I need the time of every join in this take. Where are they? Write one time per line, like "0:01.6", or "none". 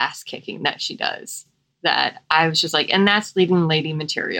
none

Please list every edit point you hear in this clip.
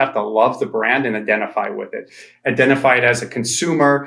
none

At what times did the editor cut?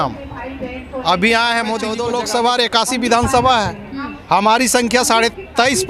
0:02.0

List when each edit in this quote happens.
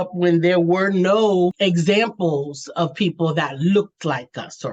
0:01.6

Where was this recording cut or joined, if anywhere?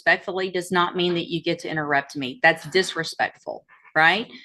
none

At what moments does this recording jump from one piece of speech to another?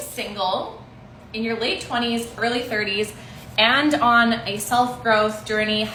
none

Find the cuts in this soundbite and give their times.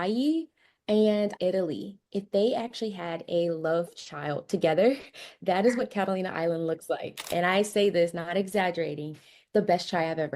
0:01.3
0:07.2

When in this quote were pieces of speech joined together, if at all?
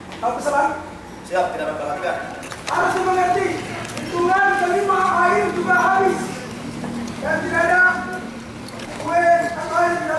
0:02.8

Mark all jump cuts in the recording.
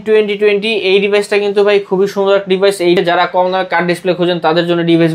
0:03.0

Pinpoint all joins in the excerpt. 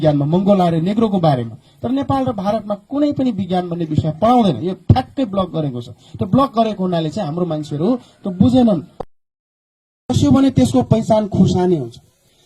0:09.1

